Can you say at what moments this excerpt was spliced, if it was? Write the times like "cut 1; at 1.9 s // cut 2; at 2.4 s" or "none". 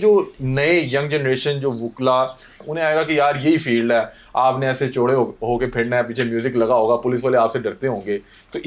cut 1; at 2.6 s